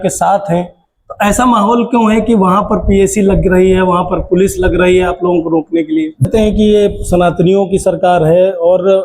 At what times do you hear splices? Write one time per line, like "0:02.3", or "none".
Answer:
0:06.3